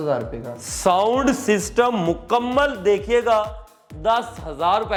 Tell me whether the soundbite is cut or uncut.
uncut